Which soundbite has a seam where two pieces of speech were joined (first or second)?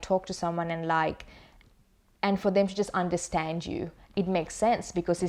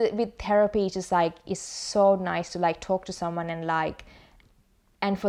first